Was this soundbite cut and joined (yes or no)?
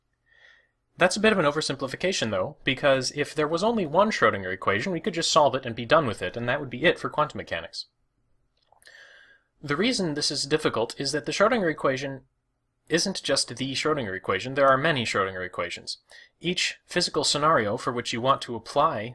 no